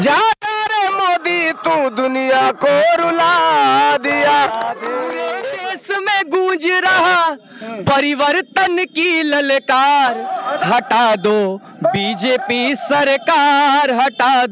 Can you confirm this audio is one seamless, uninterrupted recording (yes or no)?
no